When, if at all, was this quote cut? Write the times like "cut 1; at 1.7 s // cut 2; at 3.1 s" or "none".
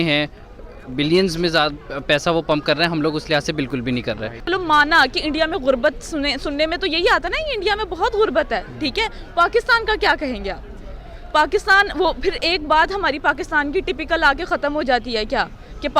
cut 1; at 4.3 s